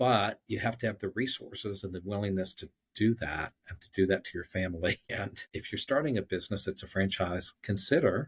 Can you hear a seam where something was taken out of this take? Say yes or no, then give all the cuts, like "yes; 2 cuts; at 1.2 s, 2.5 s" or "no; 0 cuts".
no; 0 cuts